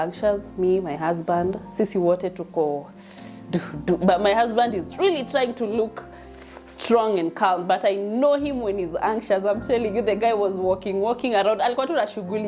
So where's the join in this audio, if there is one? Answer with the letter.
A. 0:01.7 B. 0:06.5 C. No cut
C